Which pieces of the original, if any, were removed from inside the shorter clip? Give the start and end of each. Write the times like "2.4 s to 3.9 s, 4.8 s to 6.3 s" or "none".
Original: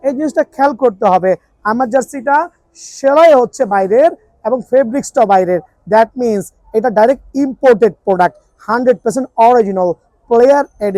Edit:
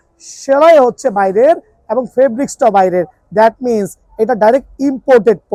none